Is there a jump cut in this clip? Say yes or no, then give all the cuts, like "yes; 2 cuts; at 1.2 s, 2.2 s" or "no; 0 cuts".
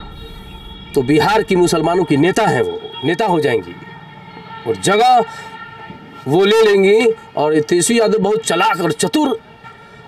no; 0 cuts